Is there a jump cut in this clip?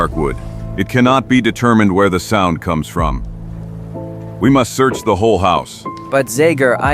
yes; 1 cut; at 4.3 s

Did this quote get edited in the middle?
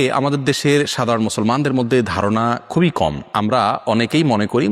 no; 0 cuts

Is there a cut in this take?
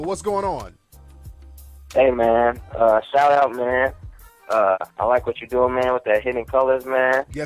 yes; 1 cut; at 6.2 s

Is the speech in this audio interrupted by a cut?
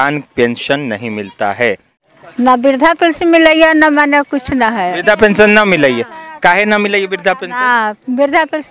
yes; 1 cut; at 1.9 s

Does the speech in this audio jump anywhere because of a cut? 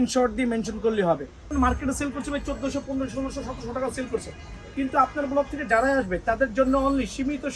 yes; 1 cut; at 1.5 s

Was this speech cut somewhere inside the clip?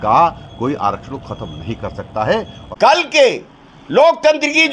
yes; 1 cut; at 2.6 s

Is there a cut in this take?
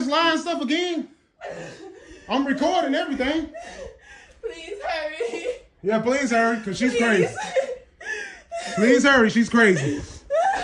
no; 0 cuts

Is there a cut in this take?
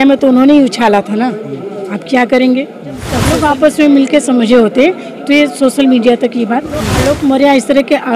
yes; 2 cuts; at 3.2 s, 6.9 s

